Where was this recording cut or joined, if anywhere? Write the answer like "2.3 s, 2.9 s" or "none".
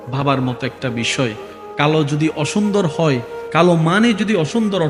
none